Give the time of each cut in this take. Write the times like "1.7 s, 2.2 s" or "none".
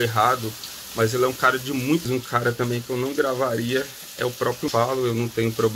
2.1 s, 4.7 s